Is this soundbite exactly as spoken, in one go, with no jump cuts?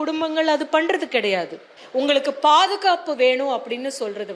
no; 1 cut; at 1.6 s

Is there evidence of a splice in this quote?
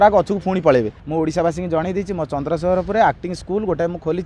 yes; 1 cut; at 1.0 s

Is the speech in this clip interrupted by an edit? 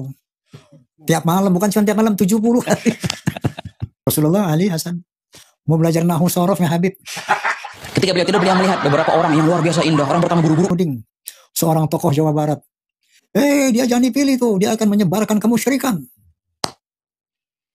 yes; 2 cuts; at 4.1 s, 10.7 s

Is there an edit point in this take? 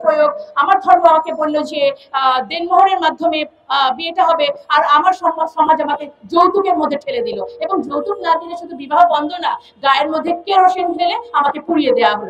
no; 0 cuts

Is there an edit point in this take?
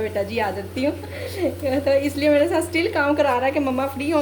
no; 0 cuts

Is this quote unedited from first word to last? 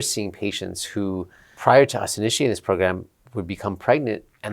no; 1 cut; at 1.4 s

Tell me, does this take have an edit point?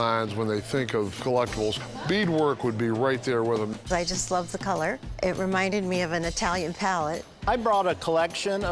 yes; 4 cuts; at 1.8 s, 3.7 s, 5.1 s, 7.4 s

